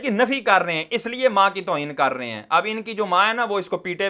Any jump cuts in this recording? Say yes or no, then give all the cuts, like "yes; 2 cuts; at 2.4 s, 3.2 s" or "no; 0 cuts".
no; 0 cuts